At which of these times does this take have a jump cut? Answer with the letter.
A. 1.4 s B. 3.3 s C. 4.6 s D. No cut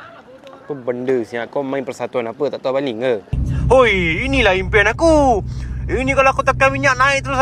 B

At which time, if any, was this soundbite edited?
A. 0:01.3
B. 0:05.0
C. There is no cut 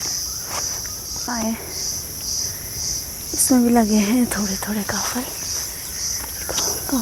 C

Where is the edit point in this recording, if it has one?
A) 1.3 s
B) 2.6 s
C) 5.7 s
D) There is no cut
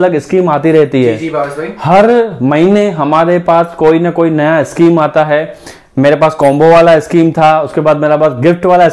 D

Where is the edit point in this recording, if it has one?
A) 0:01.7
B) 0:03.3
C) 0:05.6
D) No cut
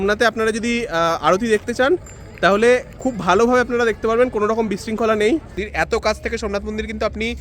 C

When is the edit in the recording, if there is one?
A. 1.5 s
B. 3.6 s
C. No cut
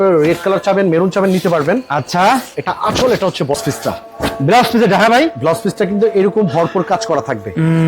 B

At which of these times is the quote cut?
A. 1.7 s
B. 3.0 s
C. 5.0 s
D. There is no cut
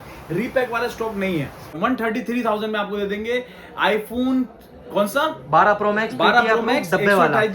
A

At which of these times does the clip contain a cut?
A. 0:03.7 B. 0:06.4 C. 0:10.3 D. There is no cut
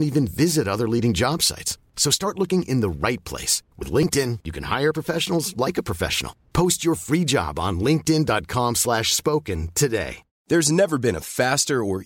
C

